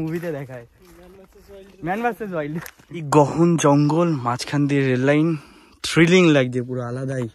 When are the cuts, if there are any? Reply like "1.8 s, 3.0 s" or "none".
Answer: 3.1 s

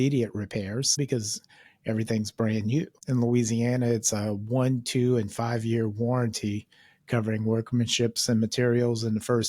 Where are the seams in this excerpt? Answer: 1.0 s, 2.9 s

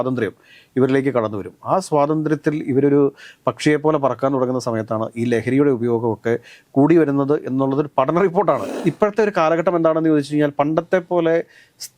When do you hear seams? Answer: 8.7 s

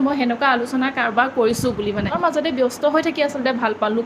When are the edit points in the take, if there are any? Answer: 2.2 s

